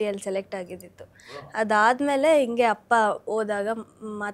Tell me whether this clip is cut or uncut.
uncut